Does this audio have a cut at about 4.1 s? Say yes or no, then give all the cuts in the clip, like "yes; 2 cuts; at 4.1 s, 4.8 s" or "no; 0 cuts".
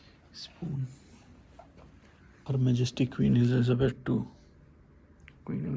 no; 1 cut; at 2.5 s